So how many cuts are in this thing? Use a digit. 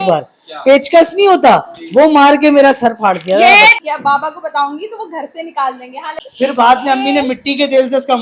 2